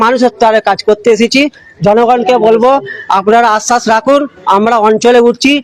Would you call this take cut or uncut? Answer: uncut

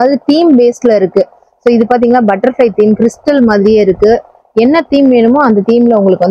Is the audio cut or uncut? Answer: uncut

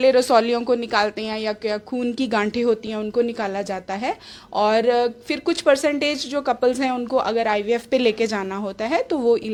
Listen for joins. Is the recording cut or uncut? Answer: uncut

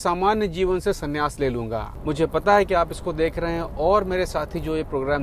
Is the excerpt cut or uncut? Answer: cut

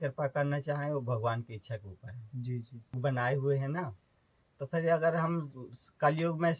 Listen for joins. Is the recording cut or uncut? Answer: cut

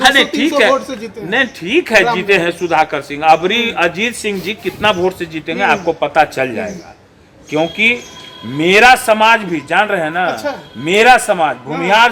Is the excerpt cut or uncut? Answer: uncut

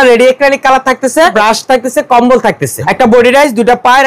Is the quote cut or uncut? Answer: cut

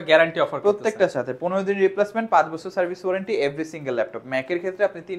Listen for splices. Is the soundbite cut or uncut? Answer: uncut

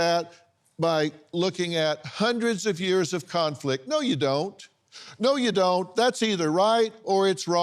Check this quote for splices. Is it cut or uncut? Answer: uncut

